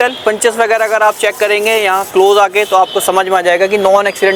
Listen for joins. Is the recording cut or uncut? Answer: uncut